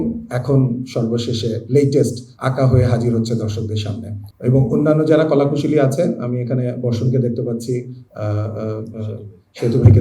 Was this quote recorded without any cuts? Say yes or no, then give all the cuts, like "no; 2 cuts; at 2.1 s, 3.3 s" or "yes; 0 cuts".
yes; 0 cuts